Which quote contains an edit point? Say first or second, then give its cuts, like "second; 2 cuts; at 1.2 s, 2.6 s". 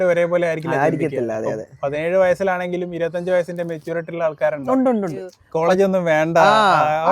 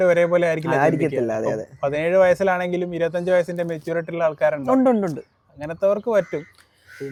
first; 1 cut; at 5.4 s